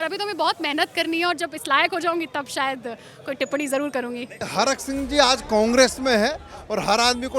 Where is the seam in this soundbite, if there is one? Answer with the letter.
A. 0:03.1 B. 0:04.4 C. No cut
B